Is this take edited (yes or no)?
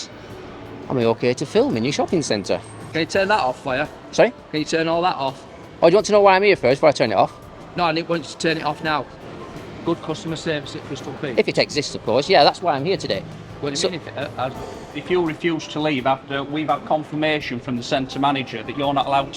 yes